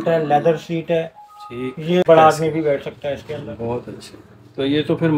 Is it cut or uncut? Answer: cut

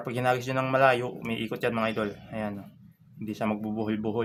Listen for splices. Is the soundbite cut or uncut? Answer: uncut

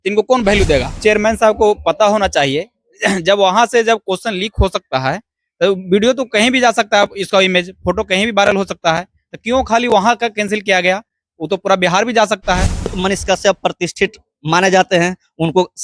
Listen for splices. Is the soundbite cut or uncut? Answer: cut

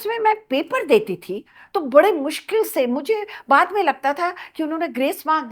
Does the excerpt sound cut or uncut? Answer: uncut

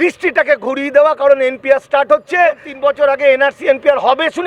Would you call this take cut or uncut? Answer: cut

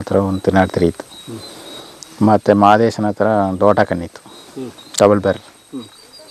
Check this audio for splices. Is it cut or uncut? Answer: uncut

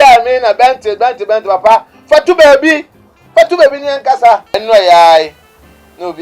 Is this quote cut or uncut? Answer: cut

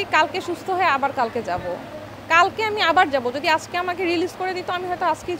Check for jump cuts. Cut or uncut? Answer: uncut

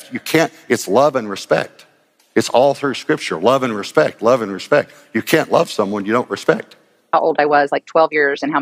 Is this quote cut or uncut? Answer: cut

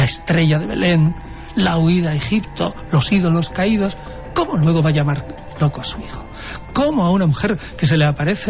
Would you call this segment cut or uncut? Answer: uncut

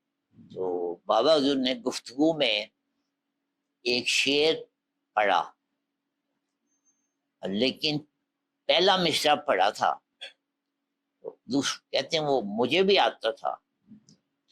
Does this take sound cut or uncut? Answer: uncut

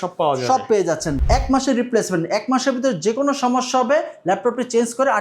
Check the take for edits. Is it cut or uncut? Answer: cut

